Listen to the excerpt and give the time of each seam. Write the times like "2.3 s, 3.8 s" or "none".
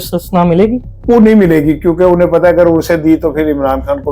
0.9 s